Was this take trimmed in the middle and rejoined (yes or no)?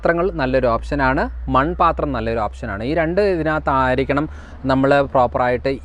no